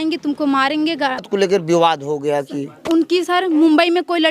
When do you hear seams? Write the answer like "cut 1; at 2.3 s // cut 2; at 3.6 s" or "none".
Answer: cut 1; at 1.2 s